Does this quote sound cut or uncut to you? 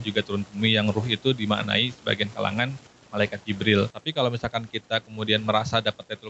cut